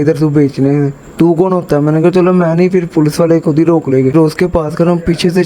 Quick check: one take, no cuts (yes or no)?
no